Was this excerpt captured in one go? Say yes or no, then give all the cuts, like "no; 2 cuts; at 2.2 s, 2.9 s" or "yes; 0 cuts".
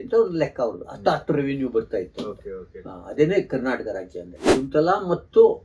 no; 1 cut; at 4.4 s